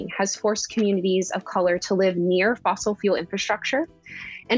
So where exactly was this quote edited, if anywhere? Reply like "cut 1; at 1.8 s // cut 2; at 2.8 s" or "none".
none